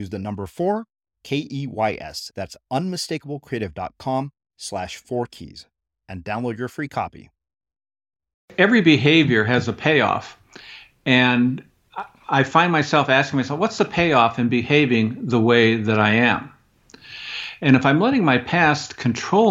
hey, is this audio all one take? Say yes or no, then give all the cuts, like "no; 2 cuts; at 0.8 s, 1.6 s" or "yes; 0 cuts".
no; 1 cut; at 8.4 s